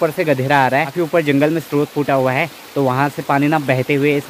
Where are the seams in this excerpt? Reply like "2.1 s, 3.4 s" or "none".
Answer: 0.9 s